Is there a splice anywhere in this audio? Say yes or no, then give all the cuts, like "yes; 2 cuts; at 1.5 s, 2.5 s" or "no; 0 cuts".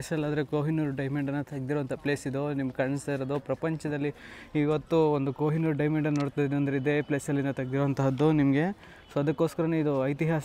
no; 0 cuts